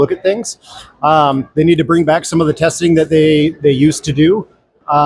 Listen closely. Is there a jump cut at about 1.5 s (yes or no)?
no